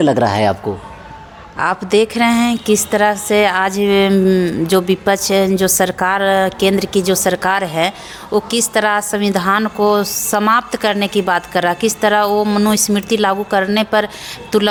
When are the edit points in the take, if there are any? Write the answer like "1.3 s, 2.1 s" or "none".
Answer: none